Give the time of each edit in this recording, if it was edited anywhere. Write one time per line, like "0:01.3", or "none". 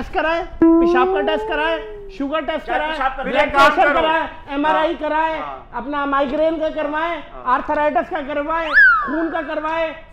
none